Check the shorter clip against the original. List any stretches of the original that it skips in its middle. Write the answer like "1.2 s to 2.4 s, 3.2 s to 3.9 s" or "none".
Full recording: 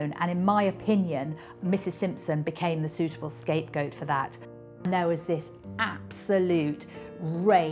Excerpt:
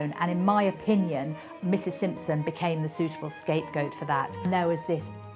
4.3 s to 4.7 s